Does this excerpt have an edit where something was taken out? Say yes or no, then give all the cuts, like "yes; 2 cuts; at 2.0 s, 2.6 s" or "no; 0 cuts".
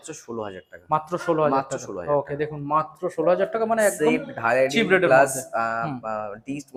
no; 0 cuts